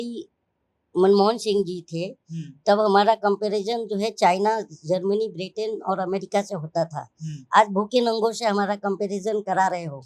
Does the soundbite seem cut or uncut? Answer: uncut